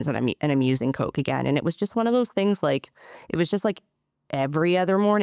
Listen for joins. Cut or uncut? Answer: uncut